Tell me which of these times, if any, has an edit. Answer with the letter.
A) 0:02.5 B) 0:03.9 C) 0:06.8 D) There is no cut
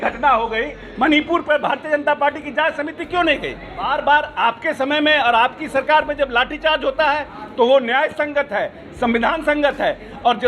B